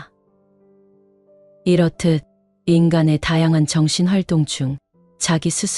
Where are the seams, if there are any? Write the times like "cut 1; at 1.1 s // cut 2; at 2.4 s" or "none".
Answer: none